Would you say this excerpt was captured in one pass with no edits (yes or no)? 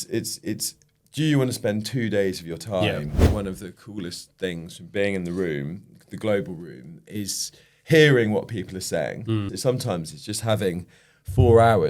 no